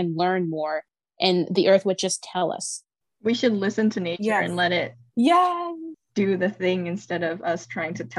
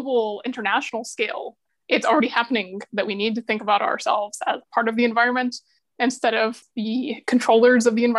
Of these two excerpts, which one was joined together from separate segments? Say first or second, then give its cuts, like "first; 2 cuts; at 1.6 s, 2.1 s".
second; 1 cut; at 6.7 s